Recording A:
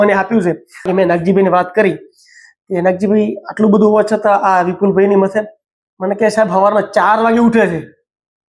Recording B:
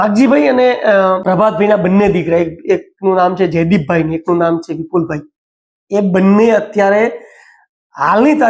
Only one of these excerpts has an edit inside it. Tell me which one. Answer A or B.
B